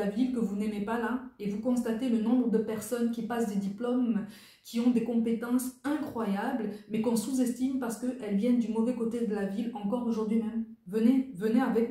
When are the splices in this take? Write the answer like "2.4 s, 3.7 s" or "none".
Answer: 10.8 s